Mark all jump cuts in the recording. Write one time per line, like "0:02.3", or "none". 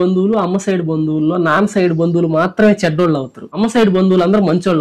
none